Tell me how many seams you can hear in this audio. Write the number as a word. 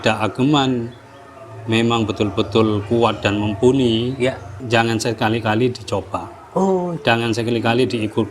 one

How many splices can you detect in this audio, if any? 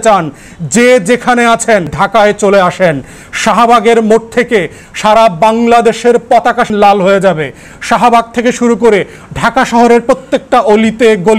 two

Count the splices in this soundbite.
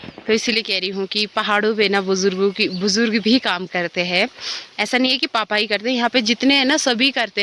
zero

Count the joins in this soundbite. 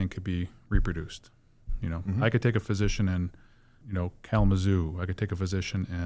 one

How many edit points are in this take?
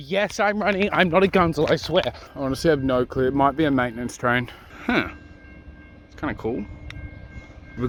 zero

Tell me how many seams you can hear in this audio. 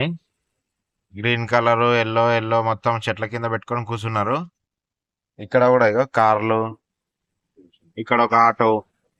zero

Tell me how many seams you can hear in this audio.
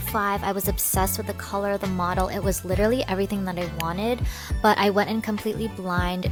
zero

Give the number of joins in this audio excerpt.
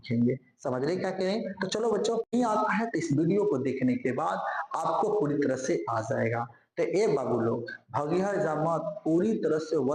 one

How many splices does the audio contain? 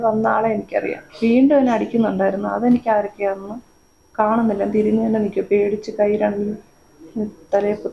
one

